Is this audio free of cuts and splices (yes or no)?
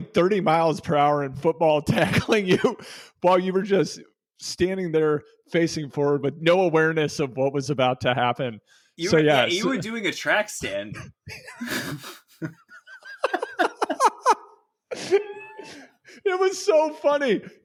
yes